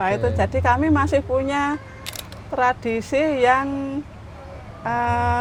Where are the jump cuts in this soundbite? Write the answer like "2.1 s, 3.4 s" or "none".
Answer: none

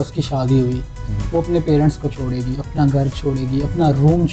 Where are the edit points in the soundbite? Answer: none

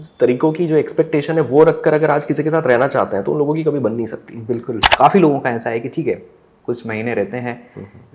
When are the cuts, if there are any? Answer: 4.9 s

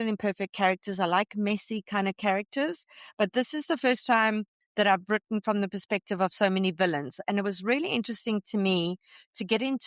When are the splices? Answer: none

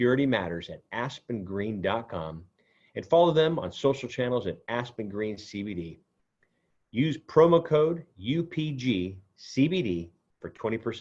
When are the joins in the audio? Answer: none

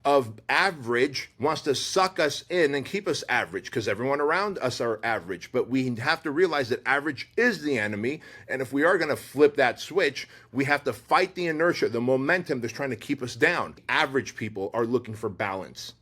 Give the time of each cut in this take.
13.8 s

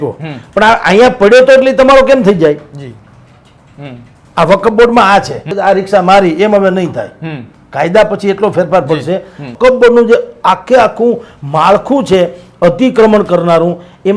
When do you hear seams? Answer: 5.5 s, 9.5 s

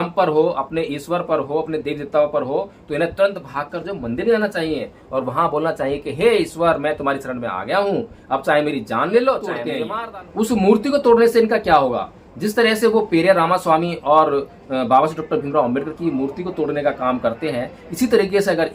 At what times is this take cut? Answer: 9.7 s

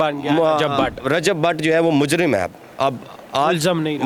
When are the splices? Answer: none

